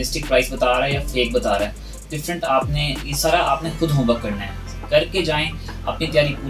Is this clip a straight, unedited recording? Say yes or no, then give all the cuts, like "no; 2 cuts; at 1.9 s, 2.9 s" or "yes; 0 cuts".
yes; 0 cuts